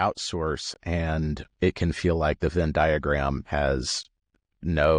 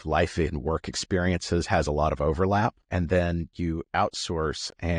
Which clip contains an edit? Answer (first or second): second